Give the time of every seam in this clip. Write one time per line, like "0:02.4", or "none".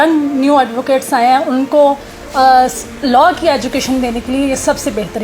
none